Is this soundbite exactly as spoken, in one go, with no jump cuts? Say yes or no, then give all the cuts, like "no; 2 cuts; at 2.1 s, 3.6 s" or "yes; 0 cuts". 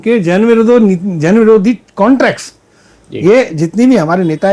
yes; 0 cuts